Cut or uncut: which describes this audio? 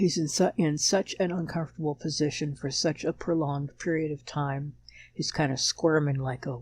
uncut